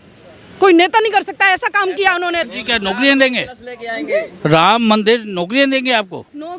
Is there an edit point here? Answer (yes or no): yes